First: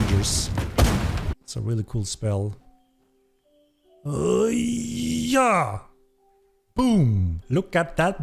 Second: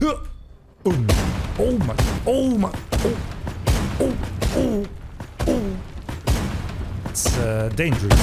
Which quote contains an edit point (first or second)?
first